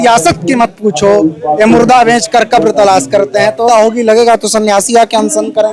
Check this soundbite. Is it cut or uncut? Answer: cut